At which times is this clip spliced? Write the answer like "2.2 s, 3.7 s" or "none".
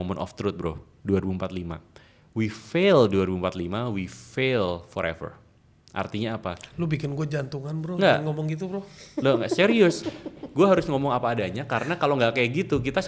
none